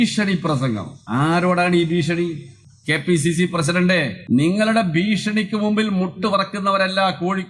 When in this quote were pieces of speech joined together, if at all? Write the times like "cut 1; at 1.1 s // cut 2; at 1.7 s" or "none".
cut 1; at 0.9 s // cut 2; at 4.1 s